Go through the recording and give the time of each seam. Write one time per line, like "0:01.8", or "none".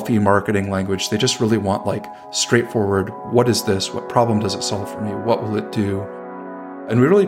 none